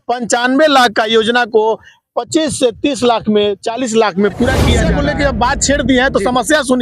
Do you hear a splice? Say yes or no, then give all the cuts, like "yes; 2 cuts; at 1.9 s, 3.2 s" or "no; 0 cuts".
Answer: yes; 1 cut; at 4.8 s